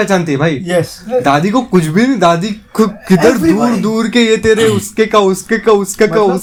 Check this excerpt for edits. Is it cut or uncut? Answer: uncut